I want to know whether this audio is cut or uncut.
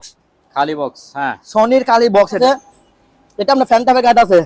cut